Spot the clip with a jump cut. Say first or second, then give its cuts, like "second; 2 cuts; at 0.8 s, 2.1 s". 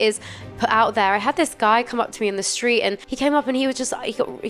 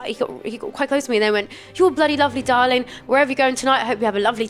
first; 1 cut; at 3.1 s